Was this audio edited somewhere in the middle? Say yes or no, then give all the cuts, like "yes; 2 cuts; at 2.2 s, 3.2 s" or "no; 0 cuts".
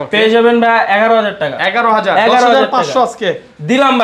no; 0 cuts